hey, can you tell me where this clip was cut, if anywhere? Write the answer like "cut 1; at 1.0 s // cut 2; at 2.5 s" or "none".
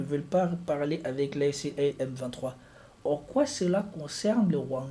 cut 1; at 1.9 s

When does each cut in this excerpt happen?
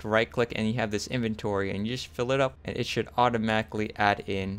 cut 1; at 2.6 s

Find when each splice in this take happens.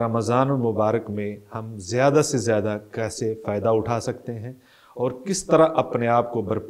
none

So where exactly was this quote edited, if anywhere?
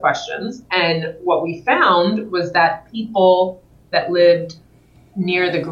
none

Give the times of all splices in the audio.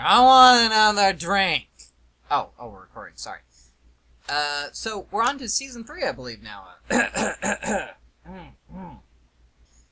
none

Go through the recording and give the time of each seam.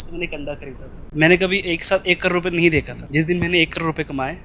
cut 1; at 1.0 s // cut 2; at 3.0 s

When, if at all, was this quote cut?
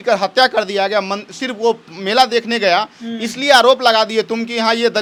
none

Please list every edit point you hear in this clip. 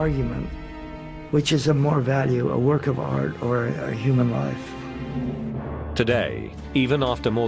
cut 1; at 5.9 s

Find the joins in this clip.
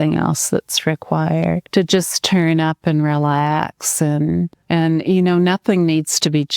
cut 1; at 1.6 s // cut 2; at 4.6 s

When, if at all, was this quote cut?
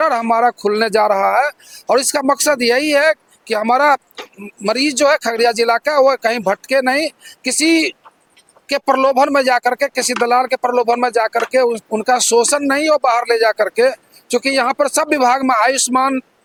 none

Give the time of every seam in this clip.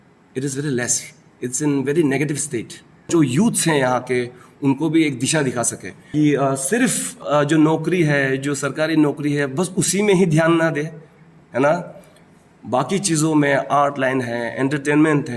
cut 1; at 3.1 s // cut 2; at 6.1 s // cut 3; at 7.2 s

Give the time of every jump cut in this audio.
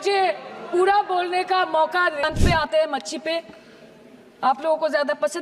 cut 1; at 2.2 s

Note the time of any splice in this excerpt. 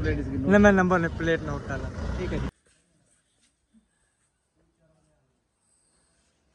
cut 1; at 2.5 s

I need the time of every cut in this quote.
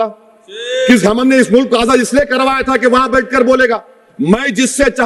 none

